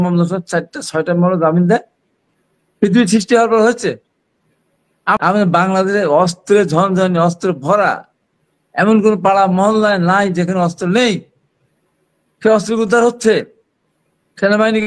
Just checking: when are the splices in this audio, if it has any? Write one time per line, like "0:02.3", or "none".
0:05.2